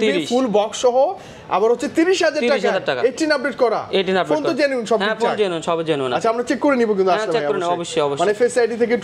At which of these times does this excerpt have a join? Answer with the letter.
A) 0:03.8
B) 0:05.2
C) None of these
C